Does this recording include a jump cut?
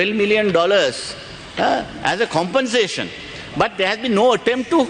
no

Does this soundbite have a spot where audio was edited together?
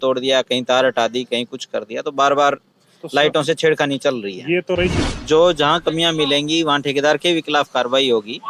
yes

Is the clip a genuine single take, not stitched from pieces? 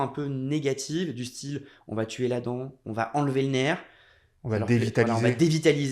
yes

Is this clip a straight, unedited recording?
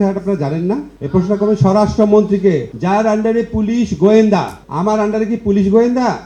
yes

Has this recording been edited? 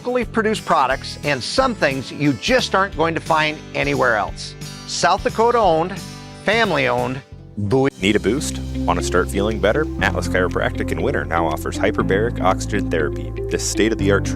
yes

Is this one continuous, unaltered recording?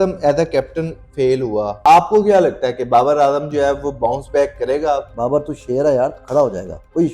no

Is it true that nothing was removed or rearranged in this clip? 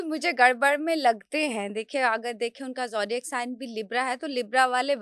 yes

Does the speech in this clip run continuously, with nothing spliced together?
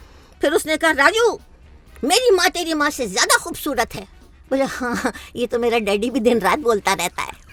yes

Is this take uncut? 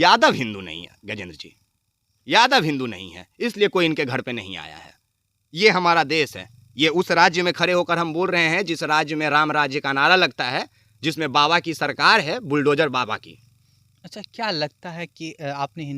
yes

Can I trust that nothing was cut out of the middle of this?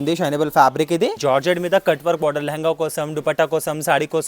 no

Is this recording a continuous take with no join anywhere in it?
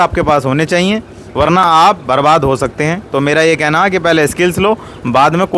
yes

